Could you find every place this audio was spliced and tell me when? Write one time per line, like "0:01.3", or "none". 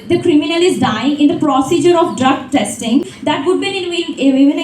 0:03.1